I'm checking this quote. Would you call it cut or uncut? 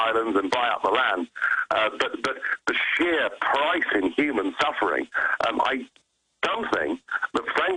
uncut